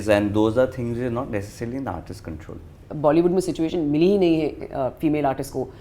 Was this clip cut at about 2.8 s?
yes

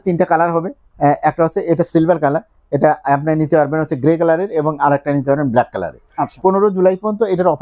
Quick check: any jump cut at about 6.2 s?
yes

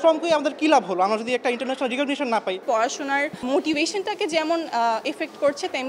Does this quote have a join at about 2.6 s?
yes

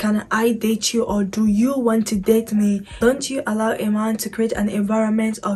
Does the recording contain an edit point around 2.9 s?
yes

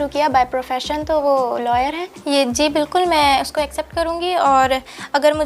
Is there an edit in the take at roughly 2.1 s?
yes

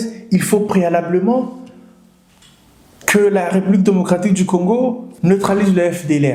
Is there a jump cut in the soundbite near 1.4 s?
no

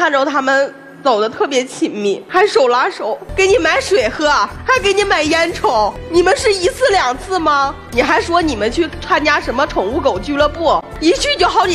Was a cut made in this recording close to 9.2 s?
no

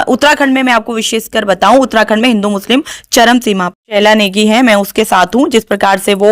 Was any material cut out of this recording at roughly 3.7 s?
yes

